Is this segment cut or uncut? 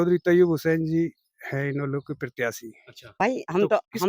cut